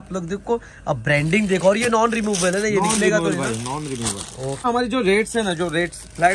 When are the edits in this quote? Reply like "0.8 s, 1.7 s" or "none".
4.6 s